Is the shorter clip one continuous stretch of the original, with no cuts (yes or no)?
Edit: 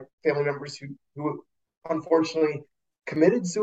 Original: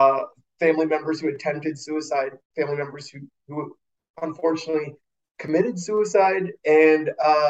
yes